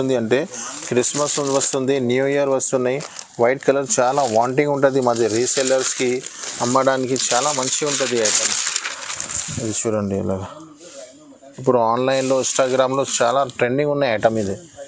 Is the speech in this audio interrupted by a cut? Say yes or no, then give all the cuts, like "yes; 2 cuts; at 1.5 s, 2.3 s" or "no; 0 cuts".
no; 0 cuts